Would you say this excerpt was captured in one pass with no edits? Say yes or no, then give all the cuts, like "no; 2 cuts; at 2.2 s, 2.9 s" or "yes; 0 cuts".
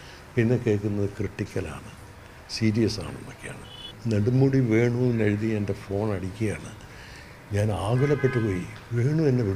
no; 1 cut; at 3.9 s